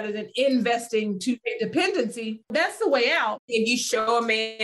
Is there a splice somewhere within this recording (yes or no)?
yes